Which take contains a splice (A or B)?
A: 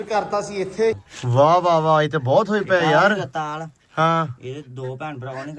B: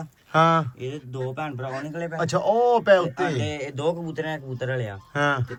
A